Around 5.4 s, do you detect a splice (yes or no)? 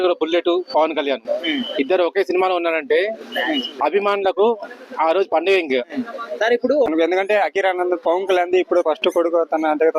no